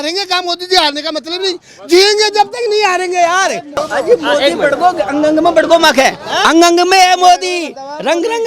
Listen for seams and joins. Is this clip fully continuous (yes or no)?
no